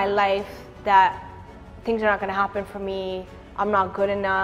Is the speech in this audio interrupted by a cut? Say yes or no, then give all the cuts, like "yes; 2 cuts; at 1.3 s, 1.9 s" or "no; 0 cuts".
no; 0 cuts